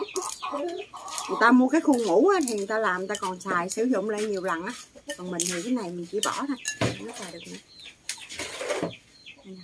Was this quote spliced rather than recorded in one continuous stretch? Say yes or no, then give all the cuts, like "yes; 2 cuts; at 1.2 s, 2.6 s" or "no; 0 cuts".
no; 0 cuts